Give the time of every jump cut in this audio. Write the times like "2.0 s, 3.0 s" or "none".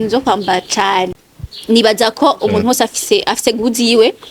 1.1 s